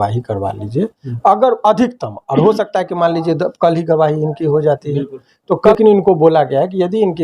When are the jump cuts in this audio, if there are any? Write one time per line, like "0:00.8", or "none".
0:05.7